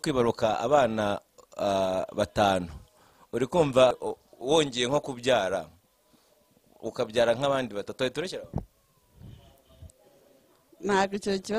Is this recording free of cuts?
no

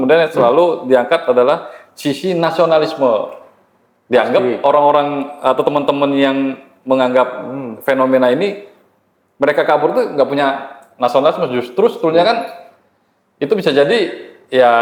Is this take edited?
no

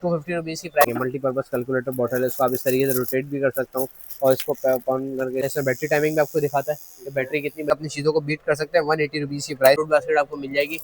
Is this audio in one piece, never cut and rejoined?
no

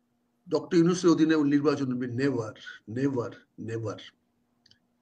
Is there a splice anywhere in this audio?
no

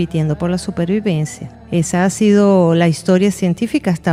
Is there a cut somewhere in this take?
no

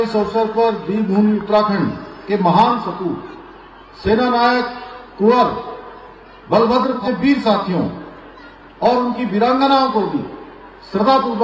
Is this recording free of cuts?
no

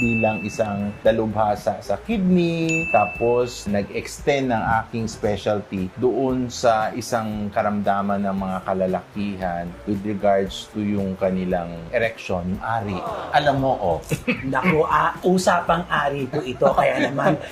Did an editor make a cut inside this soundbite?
no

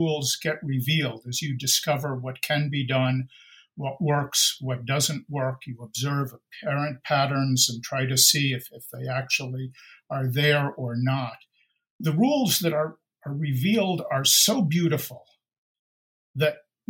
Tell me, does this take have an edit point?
yes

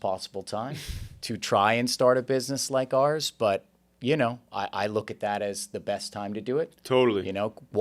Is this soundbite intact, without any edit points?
yes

